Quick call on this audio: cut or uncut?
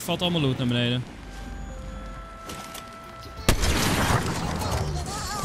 cut